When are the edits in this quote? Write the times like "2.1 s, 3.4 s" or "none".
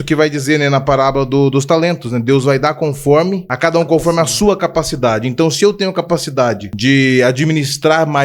3.5 s, 6.7 s